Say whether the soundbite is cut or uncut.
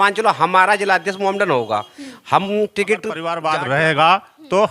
cut